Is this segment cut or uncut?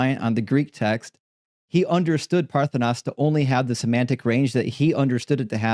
uncut